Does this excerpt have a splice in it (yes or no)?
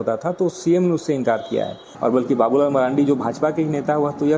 yes